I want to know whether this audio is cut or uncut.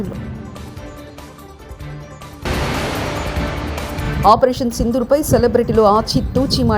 cut